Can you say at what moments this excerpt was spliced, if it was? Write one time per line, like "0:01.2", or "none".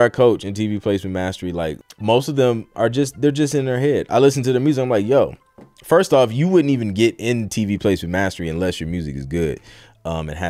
0:01.8